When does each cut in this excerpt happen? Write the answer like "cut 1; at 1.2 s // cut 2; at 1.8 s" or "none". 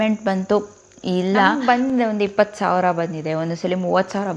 cut 1; at 1.6 s